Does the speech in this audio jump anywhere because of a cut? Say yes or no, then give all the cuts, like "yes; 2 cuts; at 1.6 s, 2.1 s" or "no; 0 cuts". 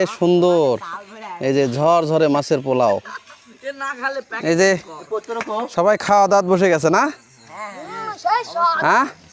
no; 0 cuts